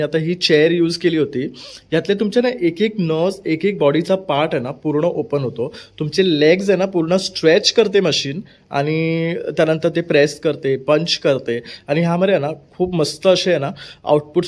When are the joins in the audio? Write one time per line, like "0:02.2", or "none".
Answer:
none